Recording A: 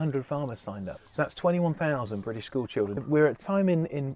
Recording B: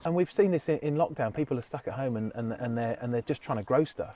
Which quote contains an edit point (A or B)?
A